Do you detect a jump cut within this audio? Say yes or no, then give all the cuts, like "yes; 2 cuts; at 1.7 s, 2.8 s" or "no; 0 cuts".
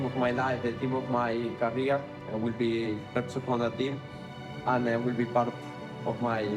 no; 0 cuts